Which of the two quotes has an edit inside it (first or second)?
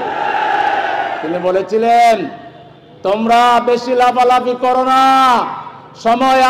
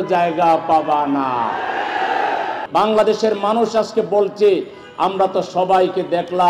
second